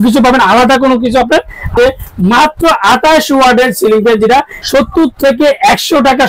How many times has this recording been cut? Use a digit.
2